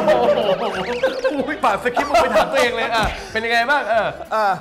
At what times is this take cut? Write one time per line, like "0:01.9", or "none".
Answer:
0:01.6